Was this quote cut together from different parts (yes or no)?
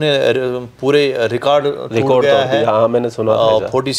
no